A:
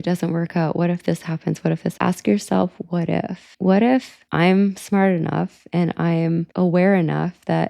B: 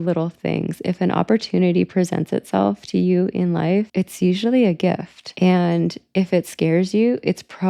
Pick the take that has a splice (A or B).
A